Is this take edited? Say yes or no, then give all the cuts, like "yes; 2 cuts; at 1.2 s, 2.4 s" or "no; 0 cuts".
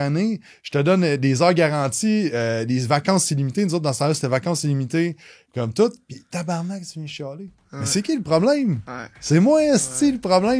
no; 0 cuts